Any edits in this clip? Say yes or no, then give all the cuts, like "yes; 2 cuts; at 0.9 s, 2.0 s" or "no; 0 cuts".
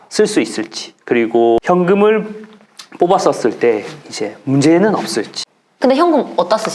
yes; 2 cuts; at 1.6 s, 5.3 s